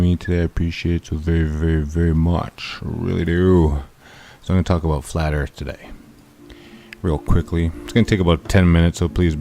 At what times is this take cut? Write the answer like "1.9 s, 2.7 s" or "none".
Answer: 8.4 s

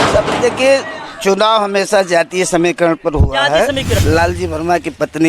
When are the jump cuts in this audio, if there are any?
4.0 s

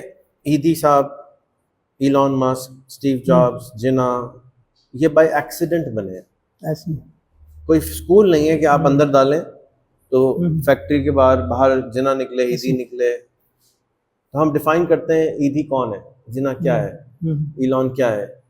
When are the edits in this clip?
none

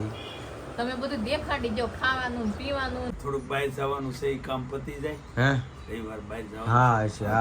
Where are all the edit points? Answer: 3.0 s

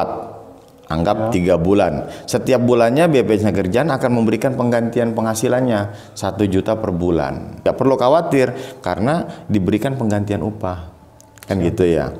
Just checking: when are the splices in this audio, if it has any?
7.6 s

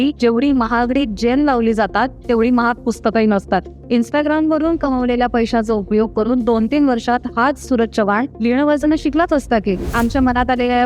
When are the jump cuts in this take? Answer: none

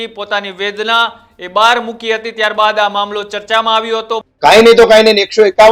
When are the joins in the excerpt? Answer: 4.1 s

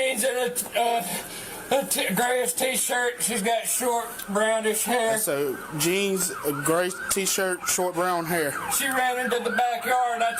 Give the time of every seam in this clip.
none

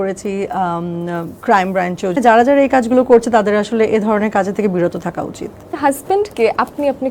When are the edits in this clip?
2.2 s, 5.6 s

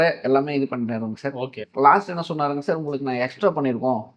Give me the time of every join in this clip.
none

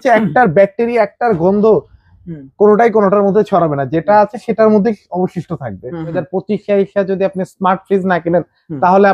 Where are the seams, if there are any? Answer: 6.2 s

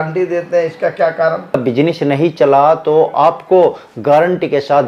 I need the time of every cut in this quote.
1.6 s

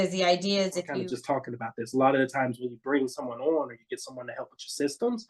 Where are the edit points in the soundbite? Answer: 0.9 s

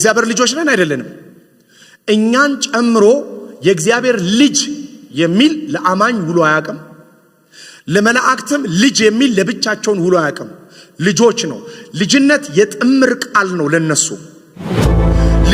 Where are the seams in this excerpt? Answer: none

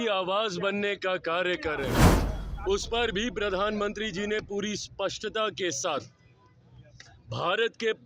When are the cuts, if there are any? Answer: none

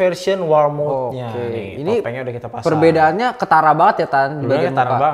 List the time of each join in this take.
none

